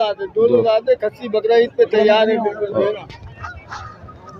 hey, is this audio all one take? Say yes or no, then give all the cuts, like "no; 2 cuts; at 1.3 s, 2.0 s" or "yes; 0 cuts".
yes; 0 cuts